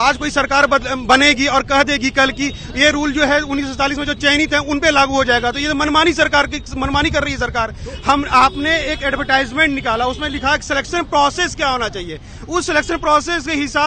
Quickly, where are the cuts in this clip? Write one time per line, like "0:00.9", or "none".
none

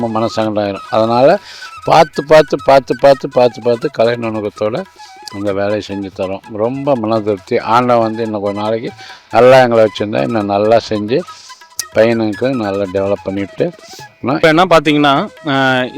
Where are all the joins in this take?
none

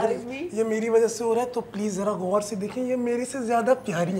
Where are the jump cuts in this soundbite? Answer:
none

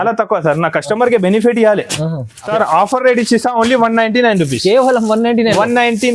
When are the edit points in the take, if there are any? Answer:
0:02.4

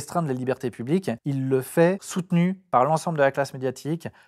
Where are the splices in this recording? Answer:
0:01.2
0:02.1

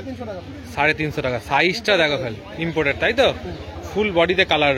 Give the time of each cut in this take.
none

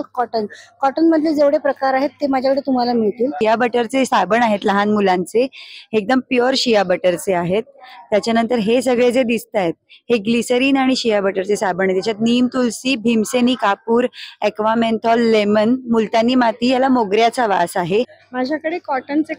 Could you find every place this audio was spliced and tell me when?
0:03.4
0:18.2

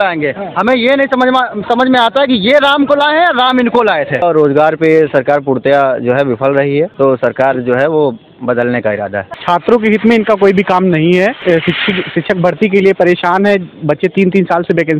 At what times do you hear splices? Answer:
0:04.2
0:06.9
0:09.4
0:11.4

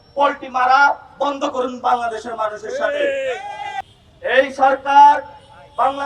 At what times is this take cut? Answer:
none

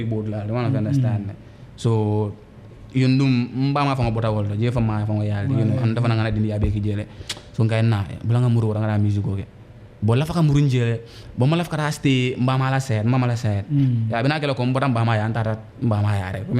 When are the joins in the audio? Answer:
none

